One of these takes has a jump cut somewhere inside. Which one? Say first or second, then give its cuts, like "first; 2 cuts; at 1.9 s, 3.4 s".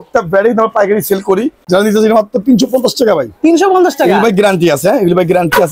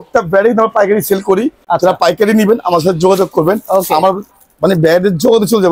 first; 1 cut; at 1.6 s